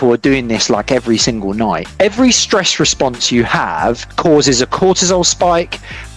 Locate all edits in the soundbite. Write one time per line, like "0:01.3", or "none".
0:01.9